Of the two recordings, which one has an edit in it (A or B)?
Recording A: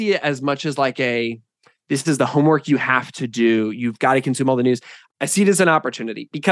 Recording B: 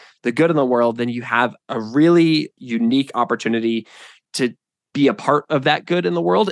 B